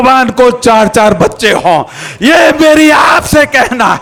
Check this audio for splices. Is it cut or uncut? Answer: uncut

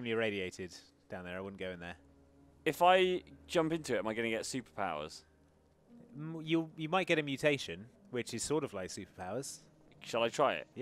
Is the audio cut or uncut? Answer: uncut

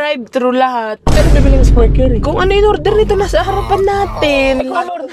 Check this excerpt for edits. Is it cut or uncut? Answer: uncut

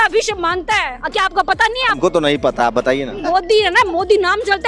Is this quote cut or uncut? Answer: cut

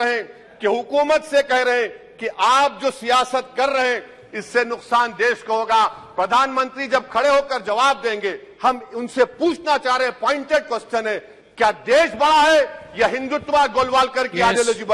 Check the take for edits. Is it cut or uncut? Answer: uncut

